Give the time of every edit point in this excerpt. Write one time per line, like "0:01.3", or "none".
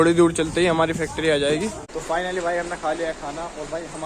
0:01.9